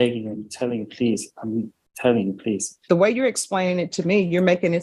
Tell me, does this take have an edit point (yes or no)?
yes